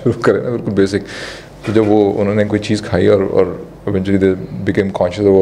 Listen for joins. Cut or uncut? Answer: uncut